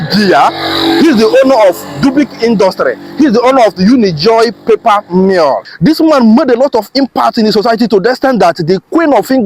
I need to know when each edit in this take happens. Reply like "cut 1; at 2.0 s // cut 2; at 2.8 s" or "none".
cut 1; at 5.7 s